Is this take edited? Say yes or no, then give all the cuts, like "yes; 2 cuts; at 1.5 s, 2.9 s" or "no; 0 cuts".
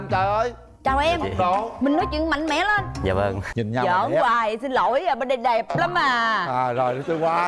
yes; 1 cut; at 3.4 s